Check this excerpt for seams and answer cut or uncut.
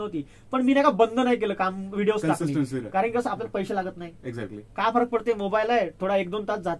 uncut